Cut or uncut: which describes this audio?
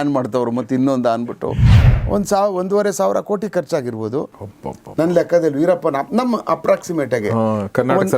cut